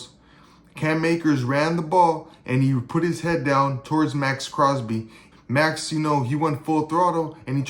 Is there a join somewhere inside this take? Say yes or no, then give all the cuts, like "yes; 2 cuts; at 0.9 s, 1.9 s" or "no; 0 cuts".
yes; 1 cut; at 5.3 s